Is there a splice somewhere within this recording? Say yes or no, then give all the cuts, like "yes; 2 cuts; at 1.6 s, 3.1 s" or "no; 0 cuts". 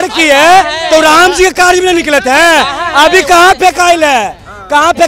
no; 0 cuts